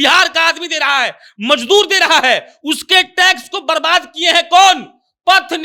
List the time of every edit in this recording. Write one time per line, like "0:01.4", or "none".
none